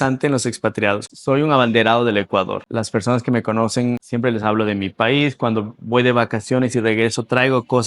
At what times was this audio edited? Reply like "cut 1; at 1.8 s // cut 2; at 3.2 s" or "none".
cut 1; at 1.1 s // cut 2; at 2.6 s // cut 3; at 4.0 s